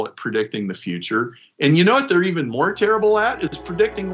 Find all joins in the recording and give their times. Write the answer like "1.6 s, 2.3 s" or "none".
none